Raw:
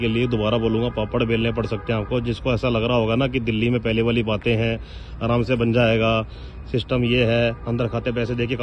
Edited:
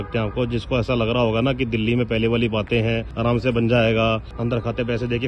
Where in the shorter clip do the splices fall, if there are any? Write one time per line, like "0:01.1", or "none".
0:03.1
0:04.4